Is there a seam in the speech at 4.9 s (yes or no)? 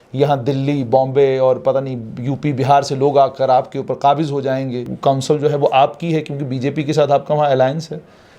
yes